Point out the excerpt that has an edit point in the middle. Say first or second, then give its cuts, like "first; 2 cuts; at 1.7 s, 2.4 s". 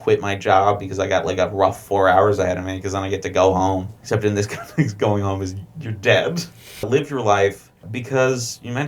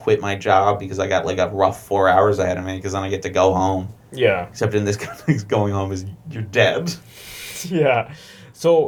first; 3 cuts; at 4.0 s, 6.9 s, 7.9 s